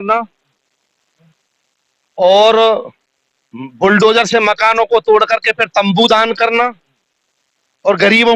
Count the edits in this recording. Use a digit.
0